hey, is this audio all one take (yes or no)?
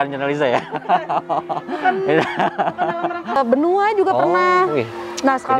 no